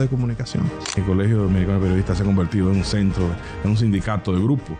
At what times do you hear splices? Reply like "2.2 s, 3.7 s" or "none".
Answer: 1.0 s